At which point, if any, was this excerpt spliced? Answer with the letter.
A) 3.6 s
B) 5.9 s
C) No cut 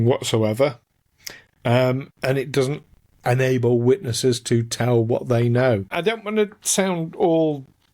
B